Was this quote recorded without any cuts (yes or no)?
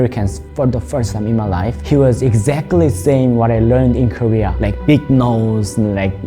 no